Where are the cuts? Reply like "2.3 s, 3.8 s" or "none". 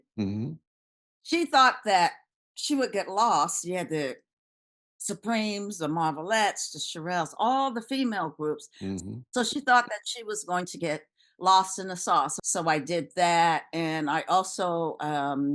12.4 s